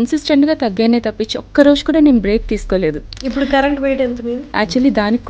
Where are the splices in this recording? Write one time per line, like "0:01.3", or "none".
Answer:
0:03.2
0:04.4